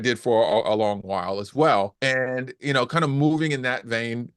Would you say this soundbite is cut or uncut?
cut